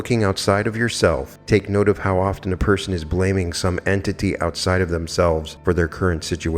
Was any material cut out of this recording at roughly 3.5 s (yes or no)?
no